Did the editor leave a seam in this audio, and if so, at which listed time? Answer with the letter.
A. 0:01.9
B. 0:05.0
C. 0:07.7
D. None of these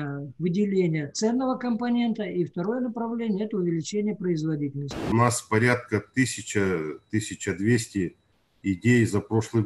B